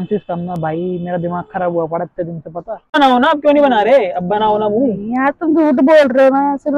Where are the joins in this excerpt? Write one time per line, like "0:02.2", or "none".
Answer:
0:03.0

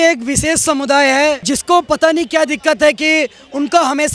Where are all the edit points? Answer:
0:01.4

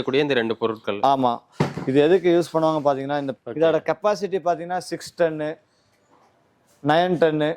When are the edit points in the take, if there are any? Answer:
0:03.3

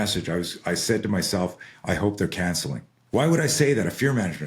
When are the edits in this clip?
0:02.9

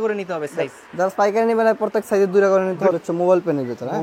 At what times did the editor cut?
0:02.9

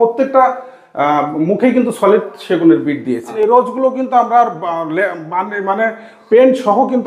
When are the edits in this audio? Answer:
0:03.3

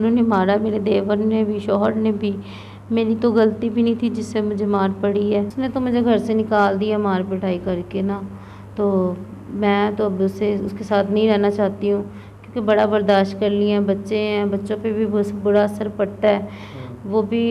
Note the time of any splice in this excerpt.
0:05.5

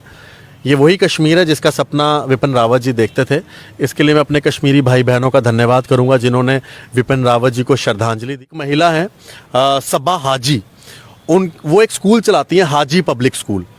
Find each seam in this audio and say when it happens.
0:08.4

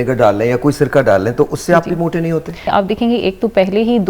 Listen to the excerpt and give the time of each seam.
0:02.7

